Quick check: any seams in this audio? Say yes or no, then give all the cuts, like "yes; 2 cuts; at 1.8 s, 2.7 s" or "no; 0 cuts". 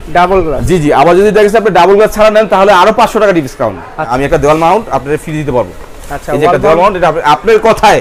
yes; 1 cut; at 4.1 s